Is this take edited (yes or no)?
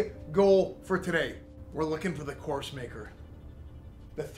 no